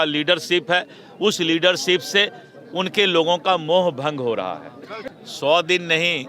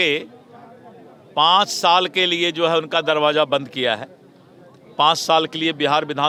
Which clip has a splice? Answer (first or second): first